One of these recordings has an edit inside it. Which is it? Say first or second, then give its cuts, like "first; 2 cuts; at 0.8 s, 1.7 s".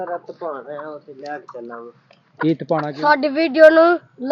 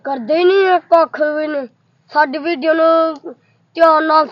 first; 1 cut; at 2.8 s